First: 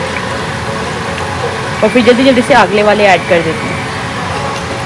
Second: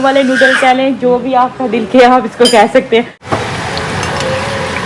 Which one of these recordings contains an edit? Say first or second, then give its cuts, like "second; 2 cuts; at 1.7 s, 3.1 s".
second; 1 cut; at 3.2 s